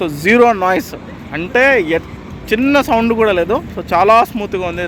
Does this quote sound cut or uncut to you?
uncut